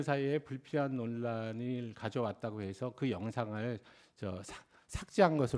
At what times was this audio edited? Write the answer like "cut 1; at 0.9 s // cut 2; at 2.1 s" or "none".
none